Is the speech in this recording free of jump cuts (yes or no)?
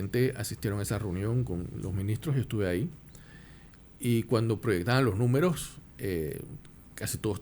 yes